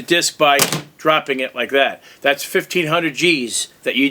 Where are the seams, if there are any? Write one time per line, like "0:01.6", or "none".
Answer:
none